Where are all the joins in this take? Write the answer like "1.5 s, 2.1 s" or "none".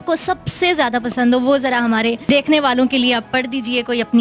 2.2 s

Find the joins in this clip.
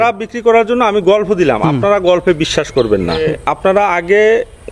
3.2 s

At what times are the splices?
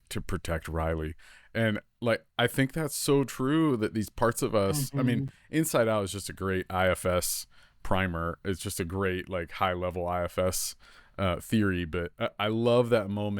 none

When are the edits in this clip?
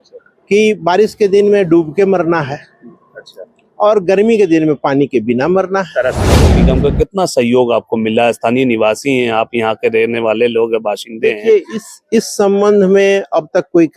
6.6 s

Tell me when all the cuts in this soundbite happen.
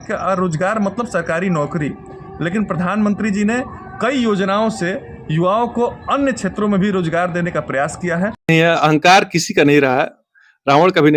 8.5 s

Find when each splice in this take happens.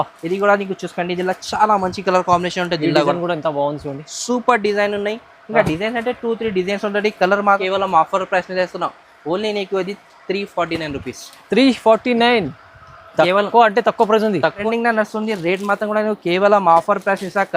7.6 s, 14.6 s

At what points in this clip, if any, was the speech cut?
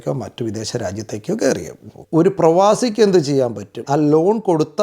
1.9 s, 3.8 s

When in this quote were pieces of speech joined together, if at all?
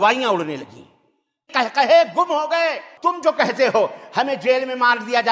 1.4 s, 2.9 s

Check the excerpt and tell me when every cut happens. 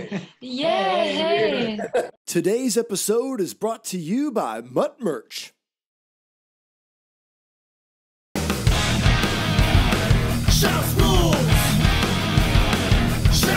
2.2 s

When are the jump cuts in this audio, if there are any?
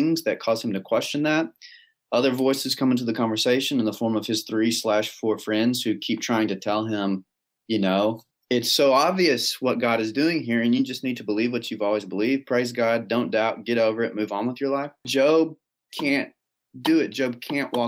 8.3 s, 15.1 s

